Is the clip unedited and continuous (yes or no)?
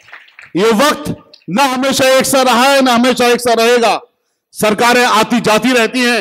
yes